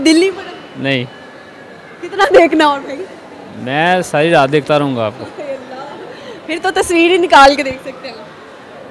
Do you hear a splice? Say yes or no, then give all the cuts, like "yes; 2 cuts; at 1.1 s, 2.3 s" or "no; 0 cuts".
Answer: no; 0 cuts